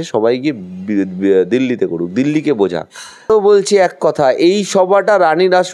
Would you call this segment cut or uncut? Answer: cut